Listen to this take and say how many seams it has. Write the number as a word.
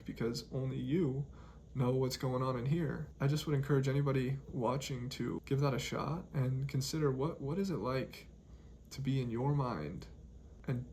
two